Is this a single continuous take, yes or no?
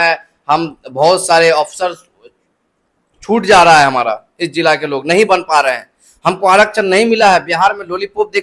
yes